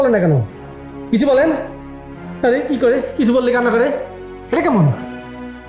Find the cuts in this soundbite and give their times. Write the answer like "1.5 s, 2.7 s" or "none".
none